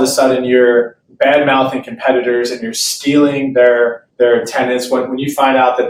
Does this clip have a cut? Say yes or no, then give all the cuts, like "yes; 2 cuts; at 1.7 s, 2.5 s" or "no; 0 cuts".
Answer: no; 0 cuts